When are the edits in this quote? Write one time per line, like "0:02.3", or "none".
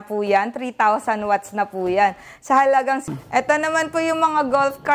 0:03.1